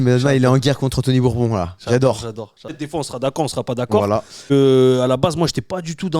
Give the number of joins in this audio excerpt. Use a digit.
2